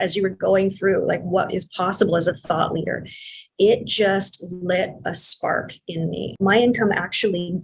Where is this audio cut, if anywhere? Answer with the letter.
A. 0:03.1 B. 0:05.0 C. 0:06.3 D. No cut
C